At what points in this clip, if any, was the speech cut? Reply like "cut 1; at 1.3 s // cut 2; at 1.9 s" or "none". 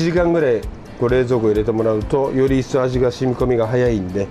none

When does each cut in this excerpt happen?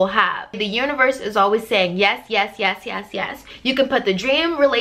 cut 1; at 3.5 s

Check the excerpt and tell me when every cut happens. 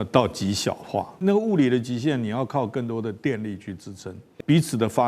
cut 1; at 1.1 s // cut 2; at 4.2 s

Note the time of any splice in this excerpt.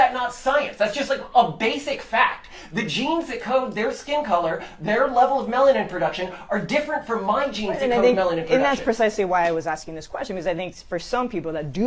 none

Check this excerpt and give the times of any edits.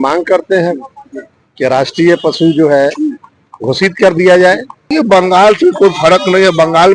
cut 1; at 4.7 s

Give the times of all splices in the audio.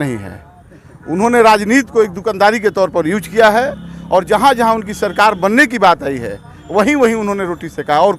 none

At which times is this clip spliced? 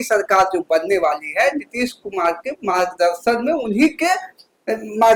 none

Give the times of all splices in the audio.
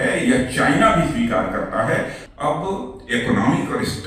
cut 1; at 2.2 s

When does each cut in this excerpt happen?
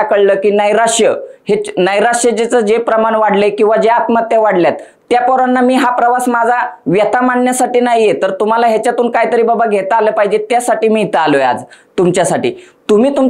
none

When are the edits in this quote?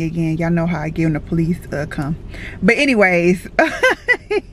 none

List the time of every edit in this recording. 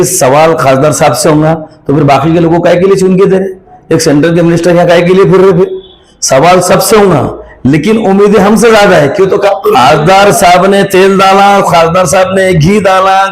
cut 1; at 9.5 s

